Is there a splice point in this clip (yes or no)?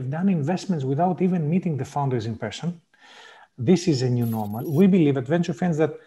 yes